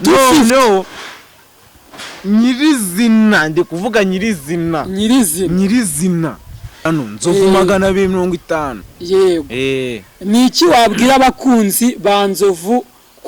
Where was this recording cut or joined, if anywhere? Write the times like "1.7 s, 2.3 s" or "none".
6.9 s